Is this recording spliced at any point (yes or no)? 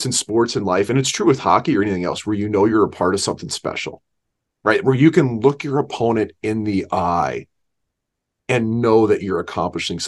no